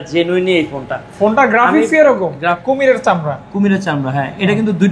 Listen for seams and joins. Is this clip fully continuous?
no; 1 cut; at 2.6 s

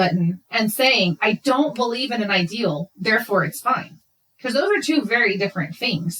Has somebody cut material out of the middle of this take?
no; 0 cuts

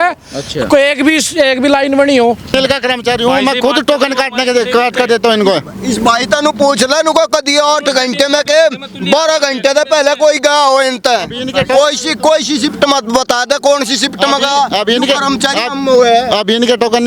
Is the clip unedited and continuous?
no; 1 cut; at 2.5 s

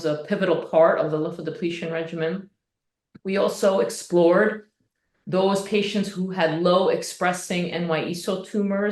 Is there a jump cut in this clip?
no; 0 cuts

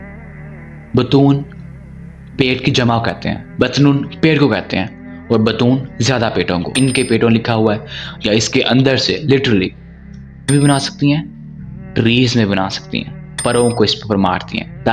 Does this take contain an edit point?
yes; 3 cuts; at 6.7 s, 10.5 s, 13.3 s

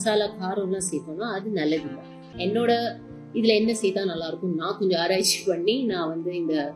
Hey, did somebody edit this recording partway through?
yes; 1 cut; at 2.3 s

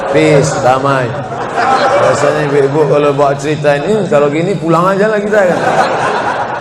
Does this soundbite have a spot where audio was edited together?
no; 0 cuts

